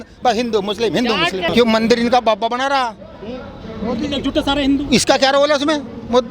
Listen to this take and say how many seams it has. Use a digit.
1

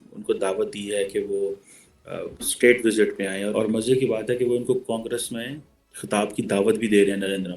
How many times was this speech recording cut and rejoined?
1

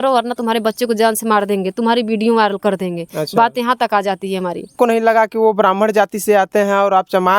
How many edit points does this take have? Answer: 1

